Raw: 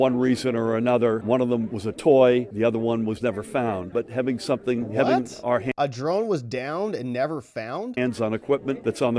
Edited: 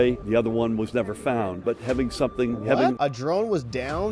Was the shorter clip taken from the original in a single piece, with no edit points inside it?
no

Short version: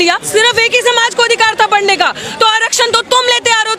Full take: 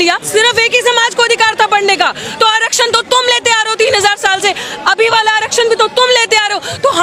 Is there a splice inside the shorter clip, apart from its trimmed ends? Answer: no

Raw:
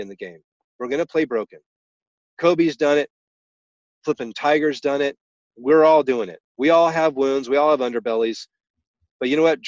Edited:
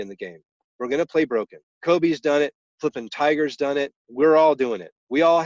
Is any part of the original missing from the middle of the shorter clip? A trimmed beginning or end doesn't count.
yes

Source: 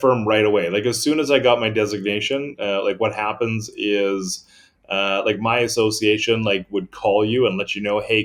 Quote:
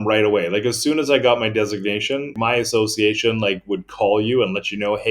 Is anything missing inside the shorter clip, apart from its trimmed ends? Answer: yes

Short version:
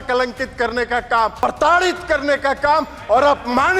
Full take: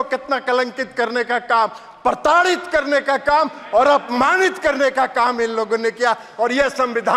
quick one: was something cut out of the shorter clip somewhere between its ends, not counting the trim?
yes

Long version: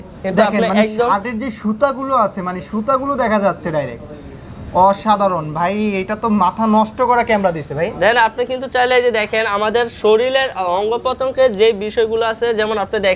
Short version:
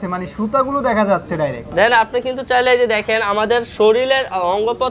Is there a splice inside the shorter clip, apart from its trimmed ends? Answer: yes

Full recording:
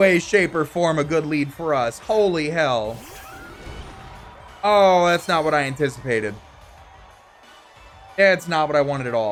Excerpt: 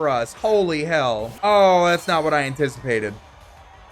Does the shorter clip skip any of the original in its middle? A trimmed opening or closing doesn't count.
yes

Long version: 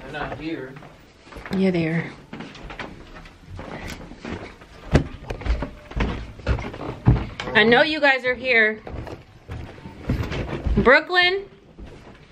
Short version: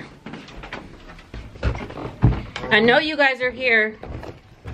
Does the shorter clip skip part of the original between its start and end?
yes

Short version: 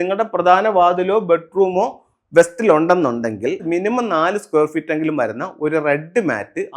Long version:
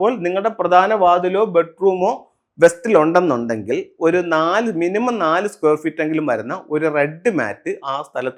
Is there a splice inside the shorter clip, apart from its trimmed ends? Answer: yes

